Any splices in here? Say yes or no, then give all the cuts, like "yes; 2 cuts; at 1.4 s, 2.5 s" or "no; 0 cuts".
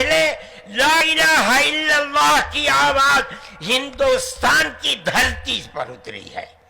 yes; 1 cut; at 1.0 s